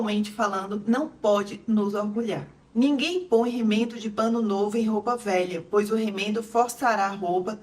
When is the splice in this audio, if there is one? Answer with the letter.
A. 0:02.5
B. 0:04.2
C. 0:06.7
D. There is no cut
A